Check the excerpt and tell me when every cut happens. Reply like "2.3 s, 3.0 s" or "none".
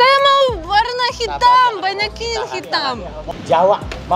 3.1 s